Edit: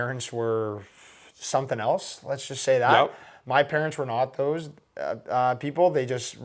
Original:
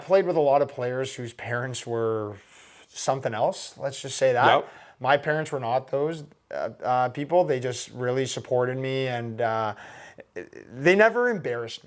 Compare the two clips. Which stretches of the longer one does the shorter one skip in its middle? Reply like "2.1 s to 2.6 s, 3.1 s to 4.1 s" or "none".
none